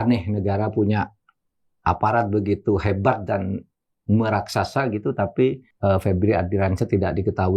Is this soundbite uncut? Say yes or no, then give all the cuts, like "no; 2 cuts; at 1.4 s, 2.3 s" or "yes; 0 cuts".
no; 1 cut; at 5.7 s